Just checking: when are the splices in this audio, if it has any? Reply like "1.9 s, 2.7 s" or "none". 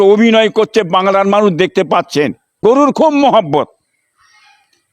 2.4 s

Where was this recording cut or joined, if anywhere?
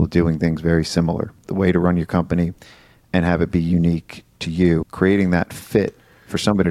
1.4 s, 4.9 s

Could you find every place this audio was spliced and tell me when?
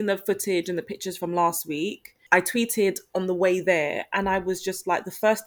2.1 s

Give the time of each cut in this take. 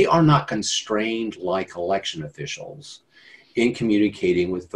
none

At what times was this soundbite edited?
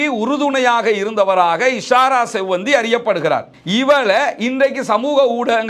3.6 s

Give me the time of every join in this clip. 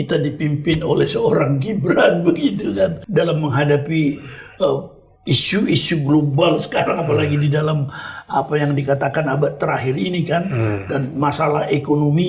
3.0 s

